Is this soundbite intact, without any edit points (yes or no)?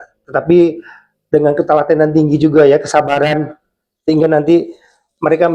yes